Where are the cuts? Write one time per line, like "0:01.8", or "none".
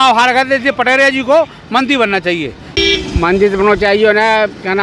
0:02.6